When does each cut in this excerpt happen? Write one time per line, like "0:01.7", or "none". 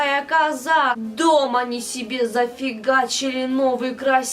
0:01.0